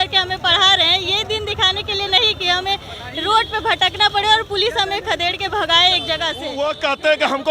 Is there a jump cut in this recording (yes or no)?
yes